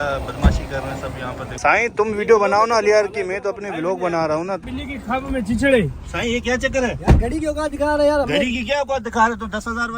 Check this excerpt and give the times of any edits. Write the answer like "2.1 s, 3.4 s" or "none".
1.5 s, 4.6 s